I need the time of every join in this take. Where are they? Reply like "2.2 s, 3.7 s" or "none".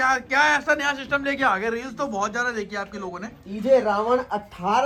none